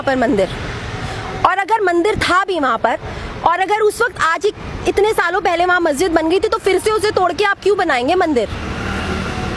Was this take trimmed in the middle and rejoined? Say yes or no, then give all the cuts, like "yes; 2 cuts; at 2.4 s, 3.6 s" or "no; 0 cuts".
no; 0 cuts